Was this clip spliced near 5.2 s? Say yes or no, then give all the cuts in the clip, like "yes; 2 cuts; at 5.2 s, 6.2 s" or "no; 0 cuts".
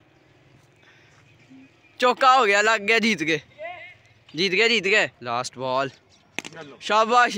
yes; 1 cut; at 5.2 s